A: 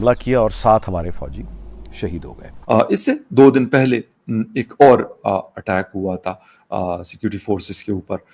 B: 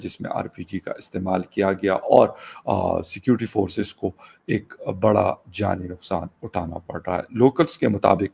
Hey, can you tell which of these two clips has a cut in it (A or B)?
A